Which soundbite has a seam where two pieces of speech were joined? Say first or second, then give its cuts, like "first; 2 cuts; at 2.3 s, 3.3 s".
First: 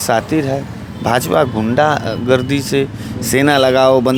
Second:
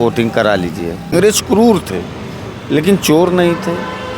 second; 1 cut; at 1.1 s